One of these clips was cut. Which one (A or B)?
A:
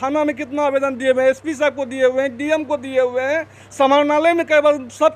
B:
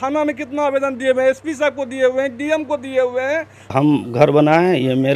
B